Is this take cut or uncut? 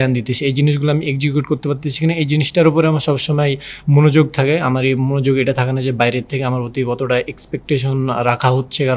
uncut